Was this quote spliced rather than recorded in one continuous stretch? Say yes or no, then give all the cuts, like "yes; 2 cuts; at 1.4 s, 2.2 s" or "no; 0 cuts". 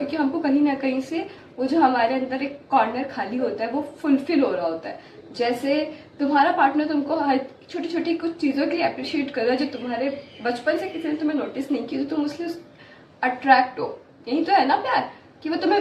no; 0 cuts